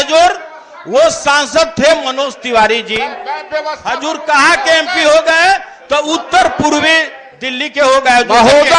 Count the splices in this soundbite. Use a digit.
0